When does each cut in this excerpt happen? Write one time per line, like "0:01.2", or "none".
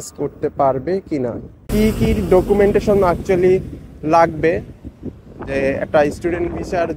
0:01.7